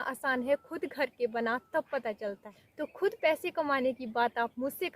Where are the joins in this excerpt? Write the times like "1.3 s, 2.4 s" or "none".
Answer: 2.4 s